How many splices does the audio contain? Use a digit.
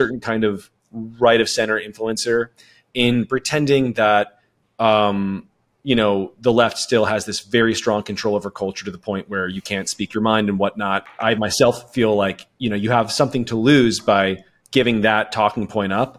1